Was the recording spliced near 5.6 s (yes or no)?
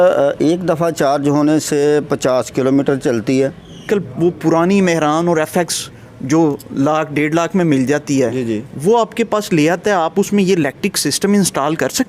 no